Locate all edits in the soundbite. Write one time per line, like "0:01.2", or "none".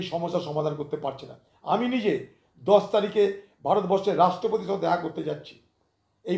none